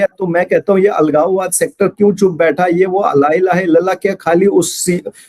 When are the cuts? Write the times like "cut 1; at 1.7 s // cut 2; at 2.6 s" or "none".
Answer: none